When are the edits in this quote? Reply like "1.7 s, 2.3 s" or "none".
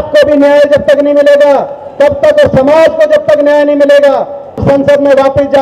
4.6 s